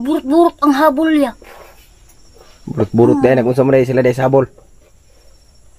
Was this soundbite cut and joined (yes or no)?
no